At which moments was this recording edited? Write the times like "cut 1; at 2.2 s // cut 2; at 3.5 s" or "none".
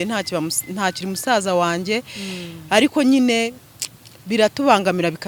none